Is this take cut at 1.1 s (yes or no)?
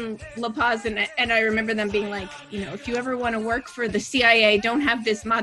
no